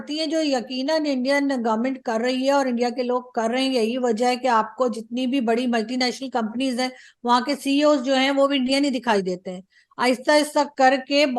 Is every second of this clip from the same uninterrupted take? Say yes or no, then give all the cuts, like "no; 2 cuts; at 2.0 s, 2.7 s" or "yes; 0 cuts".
yes; 0 cuts